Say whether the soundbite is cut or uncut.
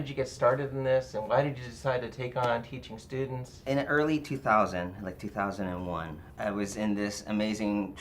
cut